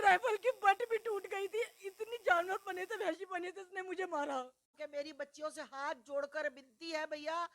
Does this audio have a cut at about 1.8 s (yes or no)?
no